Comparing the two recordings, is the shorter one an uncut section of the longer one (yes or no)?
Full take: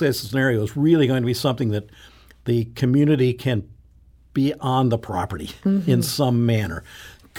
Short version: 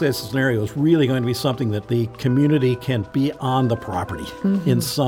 no